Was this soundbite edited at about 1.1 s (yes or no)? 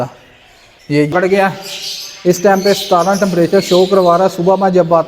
yes